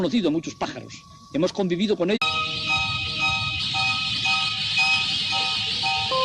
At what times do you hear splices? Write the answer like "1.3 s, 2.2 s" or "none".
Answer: none